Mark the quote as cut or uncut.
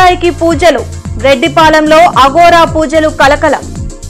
uncut